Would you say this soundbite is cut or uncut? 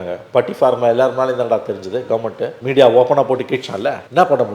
cut